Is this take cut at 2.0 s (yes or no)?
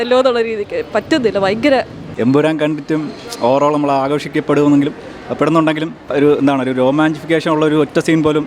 yes